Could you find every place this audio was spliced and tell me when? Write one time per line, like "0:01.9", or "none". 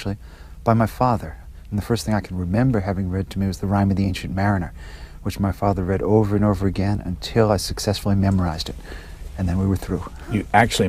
none

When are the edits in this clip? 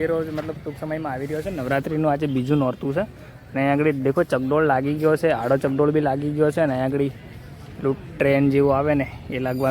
none

